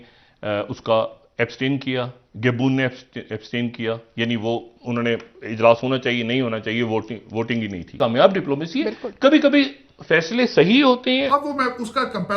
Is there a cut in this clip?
yes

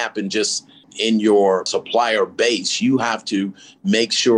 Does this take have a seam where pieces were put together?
yes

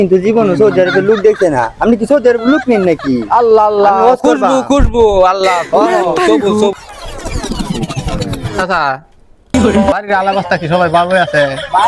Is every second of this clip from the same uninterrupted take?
no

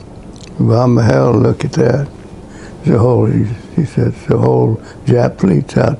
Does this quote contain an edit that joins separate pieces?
no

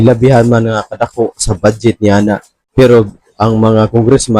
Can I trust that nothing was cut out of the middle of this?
no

